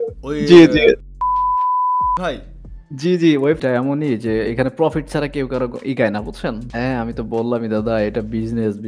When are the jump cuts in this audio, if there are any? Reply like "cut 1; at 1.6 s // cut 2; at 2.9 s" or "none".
cut 1; at 3.6 s // cut 2; at 6.7 s